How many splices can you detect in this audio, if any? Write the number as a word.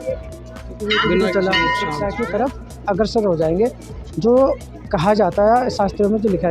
one